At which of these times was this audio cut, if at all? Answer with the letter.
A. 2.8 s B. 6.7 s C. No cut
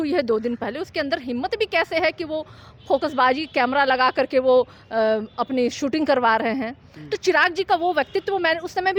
C